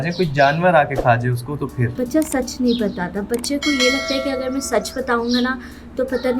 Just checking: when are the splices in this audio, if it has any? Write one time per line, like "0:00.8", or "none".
0:01.9